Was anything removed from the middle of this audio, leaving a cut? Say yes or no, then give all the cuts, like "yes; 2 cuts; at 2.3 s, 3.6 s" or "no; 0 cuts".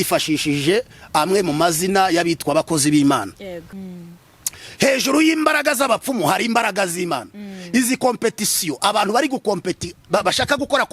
yes; 1 cut; at 3.7 s